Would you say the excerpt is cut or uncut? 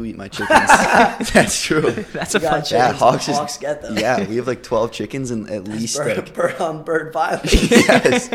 uncut